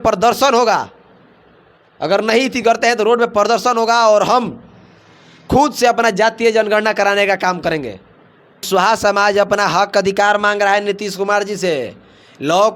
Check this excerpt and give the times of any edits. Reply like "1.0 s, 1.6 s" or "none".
8.7 s